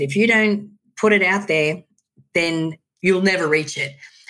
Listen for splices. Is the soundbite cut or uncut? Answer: cut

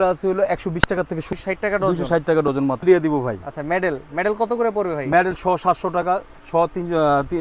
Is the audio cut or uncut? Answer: cut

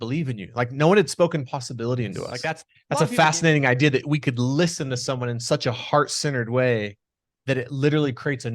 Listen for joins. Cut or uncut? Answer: cut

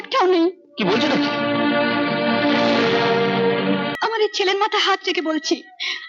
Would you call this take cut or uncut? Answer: cut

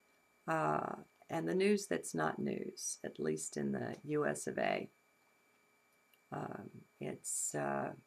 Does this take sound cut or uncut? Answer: cut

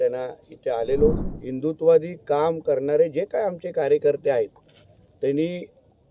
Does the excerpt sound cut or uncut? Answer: cut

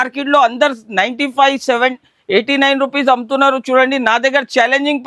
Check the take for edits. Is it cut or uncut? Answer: uncut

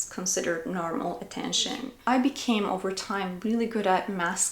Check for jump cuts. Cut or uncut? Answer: cut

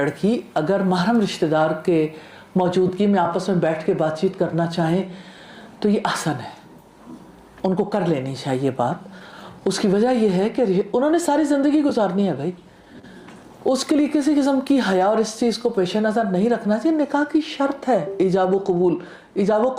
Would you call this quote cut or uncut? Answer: uncut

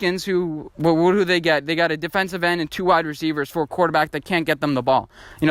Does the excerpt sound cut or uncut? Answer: uncut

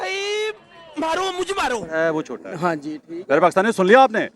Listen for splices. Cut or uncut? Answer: cut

